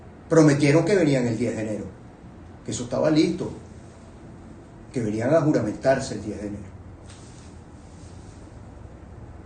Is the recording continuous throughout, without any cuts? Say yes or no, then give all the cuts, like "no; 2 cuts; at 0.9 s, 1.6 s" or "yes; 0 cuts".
yes; 0 cuts